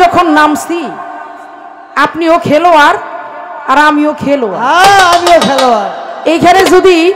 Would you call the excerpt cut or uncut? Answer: uncut